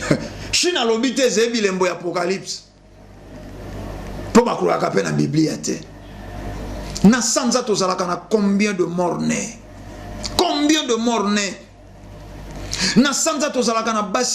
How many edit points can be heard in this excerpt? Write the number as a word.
one